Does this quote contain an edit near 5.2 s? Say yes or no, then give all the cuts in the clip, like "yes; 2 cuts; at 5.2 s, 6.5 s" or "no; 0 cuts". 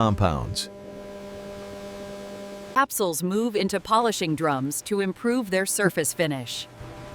no; 1 cut; at 2.7 s